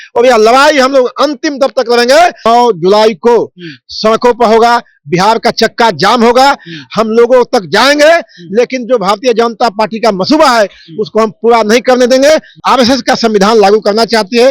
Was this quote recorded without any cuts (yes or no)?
no